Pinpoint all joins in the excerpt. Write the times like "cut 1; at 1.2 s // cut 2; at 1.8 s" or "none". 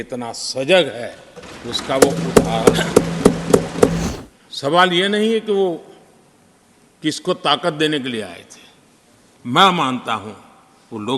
cut 1; at 4.0 s